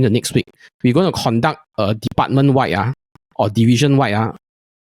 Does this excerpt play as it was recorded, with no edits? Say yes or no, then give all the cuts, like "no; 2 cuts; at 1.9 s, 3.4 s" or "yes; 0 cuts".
yes; 0 cuts